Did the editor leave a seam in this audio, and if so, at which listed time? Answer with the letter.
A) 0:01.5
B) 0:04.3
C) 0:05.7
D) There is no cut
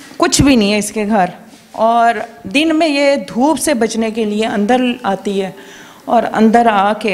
D